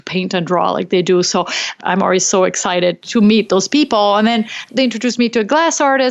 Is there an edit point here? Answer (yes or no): yes